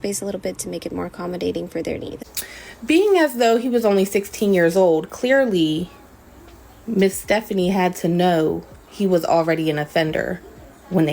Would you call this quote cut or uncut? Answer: cut